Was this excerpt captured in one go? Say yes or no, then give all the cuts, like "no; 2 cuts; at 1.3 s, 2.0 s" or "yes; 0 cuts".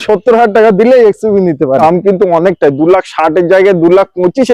no; 1 cut; at 1.8 s